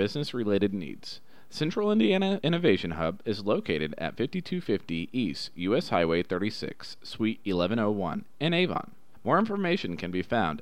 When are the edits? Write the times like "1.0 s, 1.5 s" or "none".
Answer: none